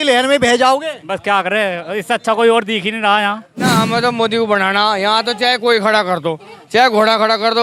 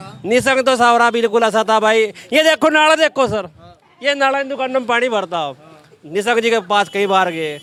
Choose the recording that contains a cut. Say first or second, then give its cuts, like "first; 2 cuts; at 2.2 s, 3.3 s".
first; 1 cut; at 3.5 s